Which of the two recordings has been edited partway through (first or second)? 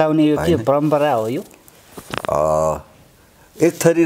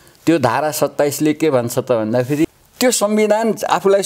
second